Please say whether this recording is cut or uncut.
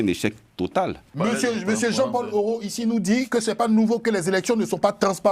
cut